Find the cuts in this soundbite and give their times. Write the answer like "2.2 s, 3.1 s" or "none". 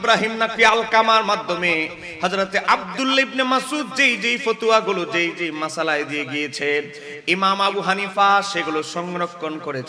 none